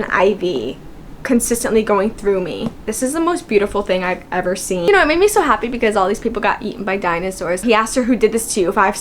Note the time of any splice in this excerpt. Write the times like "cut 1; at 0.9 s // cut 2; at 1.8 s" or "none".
cut 1; at 2.9 s // cut 2; at 4.8 s // cut 3; at 7.6 s